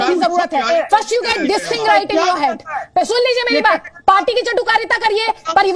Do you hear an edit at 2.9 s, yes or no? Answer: no